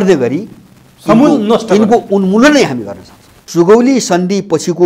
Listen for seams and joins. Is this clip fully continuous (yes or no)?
no